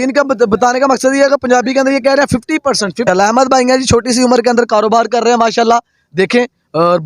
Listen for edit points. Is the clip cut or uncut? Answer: cut